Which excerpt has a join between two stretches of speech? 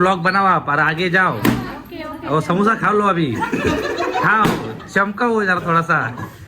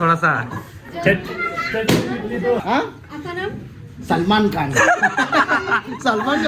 second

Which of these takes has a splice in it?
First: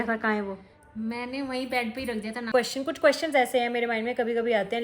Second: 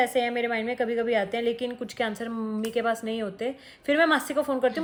first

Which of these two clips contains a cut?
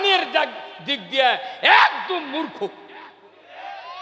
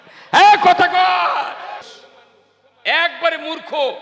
second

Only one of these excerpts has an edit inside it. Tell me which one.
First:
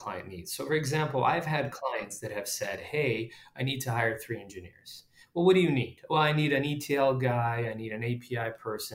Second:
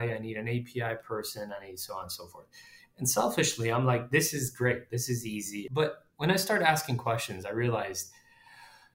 second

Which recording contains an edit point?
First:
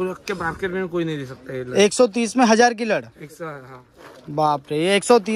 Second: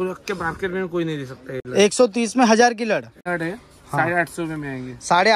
second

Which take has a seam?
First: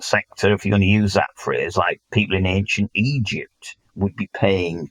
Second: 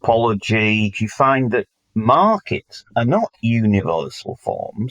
second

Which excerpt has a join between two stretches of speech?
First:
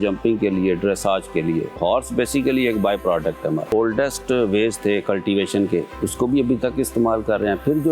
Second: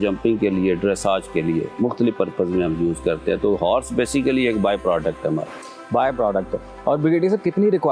first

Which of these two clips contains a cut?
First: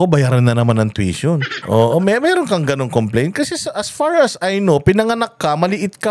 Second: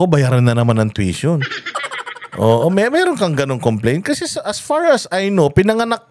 first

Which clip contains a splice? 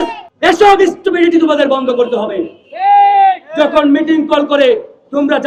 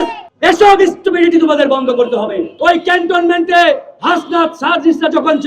second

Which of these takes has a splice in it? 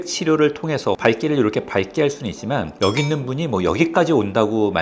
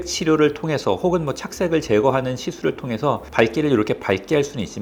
first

